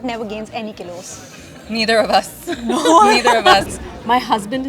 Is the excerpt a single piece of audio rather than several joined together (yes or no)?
no